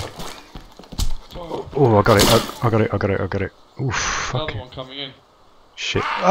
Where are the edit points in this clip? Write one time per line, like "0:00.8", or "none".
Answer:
none